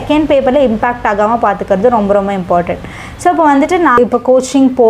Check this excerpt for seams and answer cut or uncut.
cut